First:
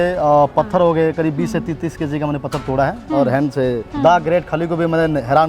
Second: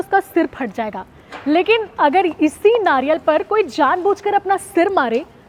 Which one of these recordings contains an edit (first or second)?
first